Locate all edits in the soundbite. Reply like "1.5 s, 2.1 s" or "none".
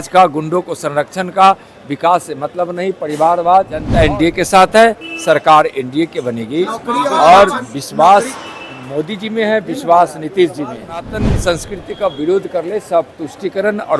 3.9 s, 11.2 s